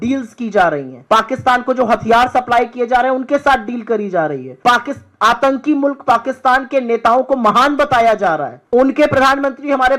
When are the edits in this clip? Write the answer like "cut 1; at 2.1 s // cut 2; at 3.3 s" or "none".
cut 1; at 0.9 s // cut 2; at 4.5 s // cut 3; at 8.5 s